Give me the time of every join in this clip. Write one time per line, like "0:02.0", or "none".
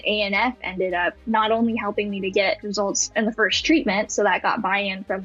0:01.2